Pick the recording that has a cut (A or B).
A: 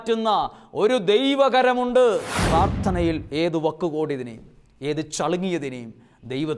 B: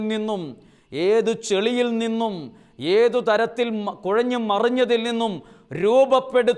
A